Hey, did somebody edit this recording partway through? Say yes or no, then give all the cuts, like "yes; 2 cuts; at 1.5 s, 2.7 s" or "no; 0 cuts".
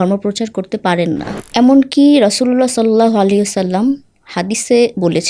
yes; 1 cut; at 1.4 s